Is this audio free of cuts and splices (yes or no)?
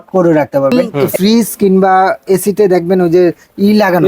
no